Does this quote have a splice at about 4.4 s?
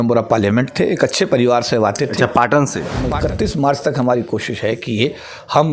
no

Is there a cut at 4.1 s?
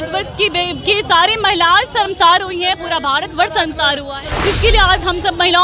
yes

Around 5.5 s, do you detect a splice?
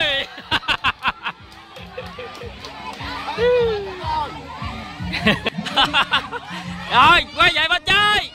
yes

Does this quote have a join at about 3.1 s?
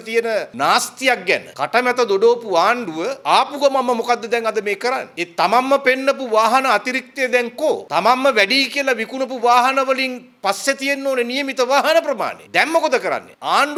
no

